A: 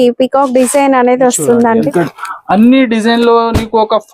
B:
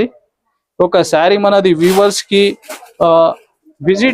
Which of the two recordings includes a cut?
A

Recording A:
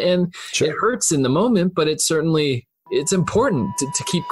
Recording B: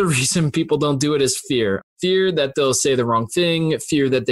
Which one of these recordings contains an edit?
B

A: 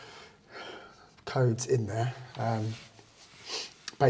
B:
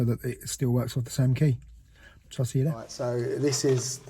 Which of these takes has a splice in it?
B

